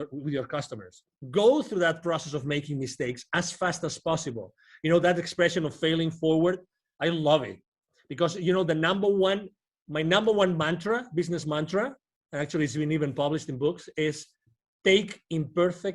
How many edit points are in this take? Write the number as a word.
one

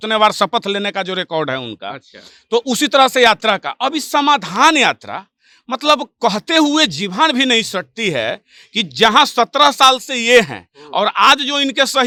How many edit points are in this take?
zero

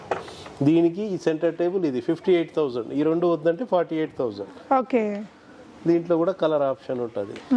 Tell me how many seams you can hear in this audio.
zero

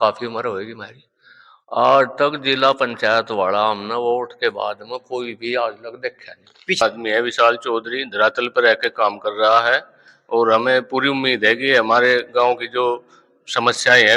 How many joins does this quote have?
one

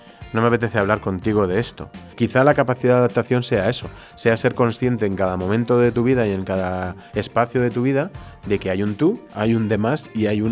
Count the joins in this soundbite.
two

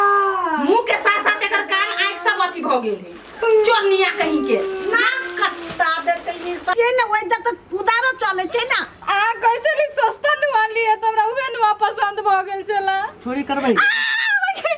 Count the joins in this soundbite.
one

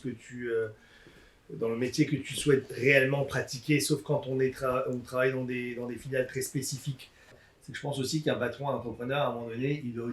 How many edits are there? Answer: one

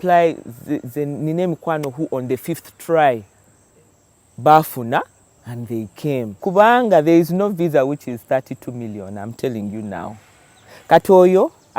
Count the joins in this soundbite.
one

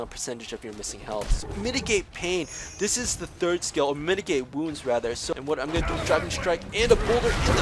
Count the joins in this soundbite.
two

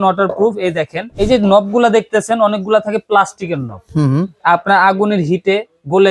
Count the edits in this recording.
one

